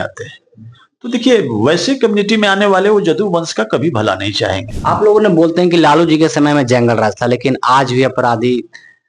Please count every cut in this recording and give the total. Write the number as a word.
one